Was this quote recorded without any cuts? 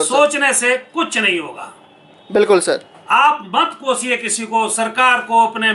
yes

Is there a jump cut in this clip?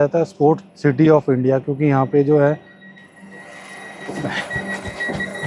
no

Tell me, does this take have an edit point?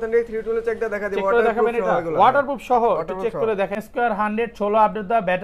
yes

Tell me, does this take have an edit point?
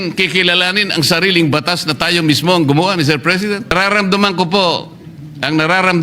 yes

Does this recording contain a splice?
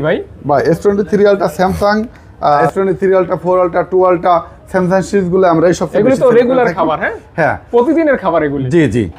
no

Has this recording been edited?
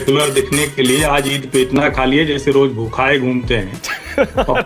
no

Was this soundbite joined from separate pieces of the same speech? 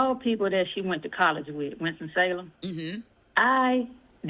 no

